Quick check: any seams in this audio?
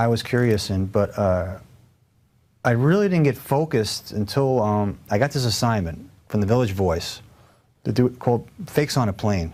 no; 0 cuts

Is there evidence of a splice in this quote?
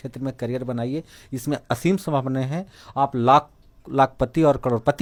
no; 0 cuts

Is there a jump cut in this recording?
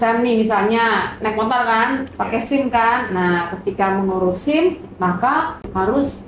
no; 0 cuts

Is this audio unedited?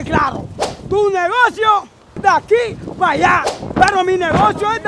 yes; 0 cuts

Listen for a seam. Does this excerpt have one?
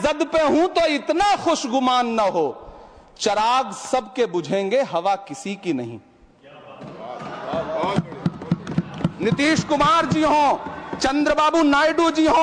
no; 0 cuts

